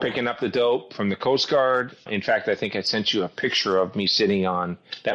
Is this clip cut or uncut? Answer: cut